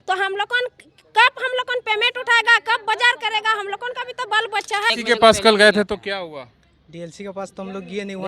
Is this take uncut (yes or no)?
no